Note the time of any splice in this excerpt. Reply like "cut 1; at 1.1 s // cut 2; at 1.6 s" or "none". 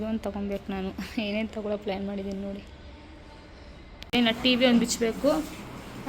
cut 1; at 4.1 s